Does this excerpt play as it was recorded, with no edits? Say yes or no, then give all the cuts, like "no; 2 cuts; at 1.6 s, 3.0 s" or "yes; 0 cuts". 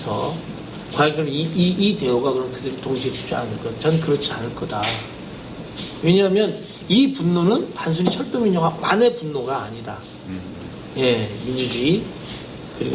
yes; 0 cuts